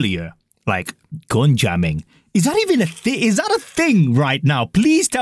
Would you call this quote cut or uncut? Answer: uncut